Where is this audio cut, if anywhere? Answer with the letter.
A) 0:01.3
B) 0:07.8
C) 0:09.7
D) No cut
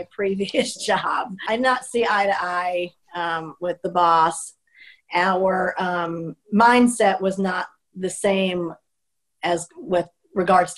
A